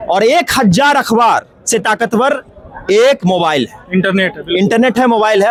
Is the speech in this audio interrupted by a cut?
no; 0 cuts

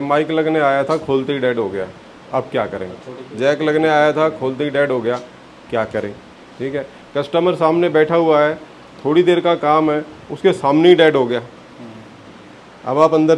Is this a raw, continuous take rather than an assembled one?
yes; 0 cuts

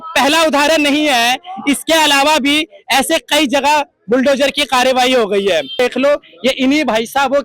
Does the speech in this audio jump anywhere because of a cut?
yes; 1 cut; at 5.8 s

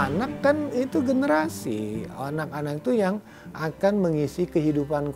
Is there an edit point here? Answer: no; 0 cuts

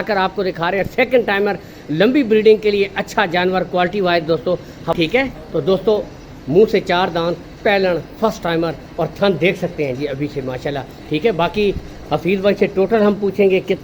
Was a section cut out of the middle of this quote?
yes; 1 cut; at 4.9 s

